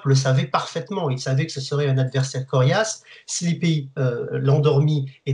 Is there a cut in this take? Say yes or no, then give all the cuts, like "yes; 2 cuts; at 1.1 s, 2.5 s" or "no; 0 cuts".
no; 0 cuts